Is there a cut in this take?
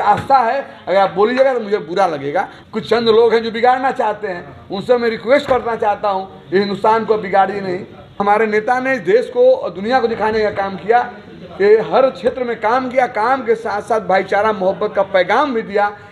yes; 2 cuts; at 2.6 s, 8.2 s

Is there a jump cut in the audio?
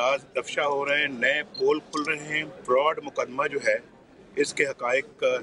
yes; 1 cut; at 2.6 s

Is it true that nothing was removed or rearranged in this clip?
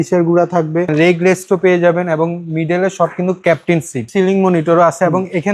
no; 2 cuts; at 0.9 s, 4.0 s

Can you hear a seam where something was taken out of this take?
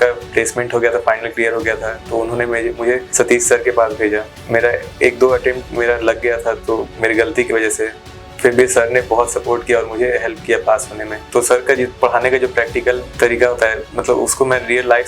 yes; 4 cuts; at 3.1 s, 4.3 s, 11.2 s, 13.1 s

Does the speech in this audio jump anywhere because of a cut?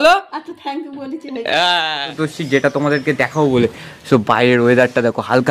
yes; 1 cut; at 2.1 s

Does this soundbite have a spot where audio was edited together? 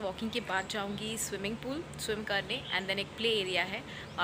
no; 0 cuts

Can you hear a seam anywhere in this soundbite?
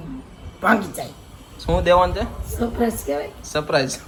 no; 0 cuts

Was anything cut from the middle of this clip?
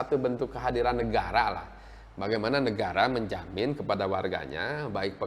no; 0 cuts

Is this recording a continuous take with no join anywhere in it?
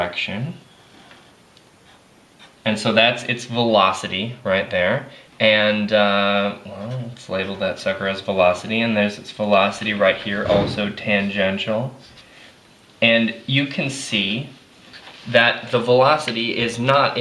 yes; 0 cuts

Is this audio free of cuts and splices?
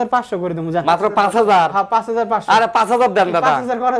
yes; 0 cuts

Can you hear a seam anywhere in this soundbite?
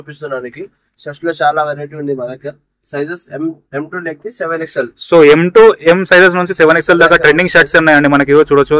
no; 0 cuts

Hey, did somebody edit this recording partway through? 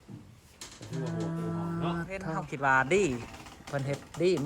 yes; 1 cut; at 2.4 s

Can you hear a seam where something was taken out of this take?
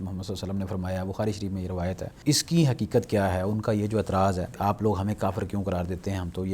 yes; 2 cuts; at 2.2 s, 4.6 s

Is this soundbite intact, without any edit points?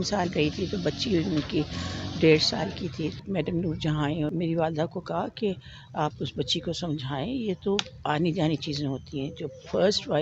no; 2 cuts; at 3.2 s, 4.3 s

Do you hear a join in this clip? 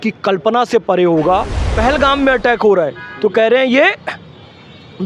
yes; 1 cut; at 1.6 s

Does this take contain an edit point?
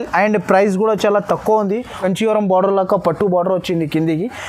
yes; 1 cut; at 2.0 s

